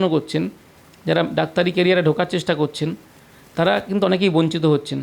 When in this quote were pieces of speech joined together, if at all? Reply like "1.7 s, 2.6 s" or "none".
none